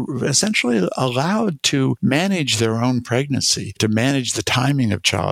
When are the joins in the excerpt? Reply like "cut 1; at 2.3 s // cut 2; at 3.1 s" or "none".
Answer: cut 1; at 2.0 s